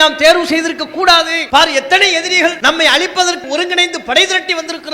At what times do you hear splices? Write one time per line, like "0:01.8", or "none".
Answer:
0:01.4
0:02.6
0:03.4